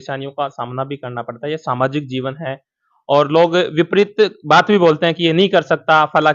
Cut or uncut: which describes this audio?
uncut